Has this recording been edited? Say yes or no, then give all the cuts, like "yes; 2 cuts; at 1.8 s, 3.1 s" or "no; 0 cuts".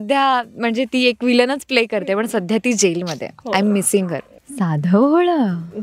yes; 1 cut; at 4.3 s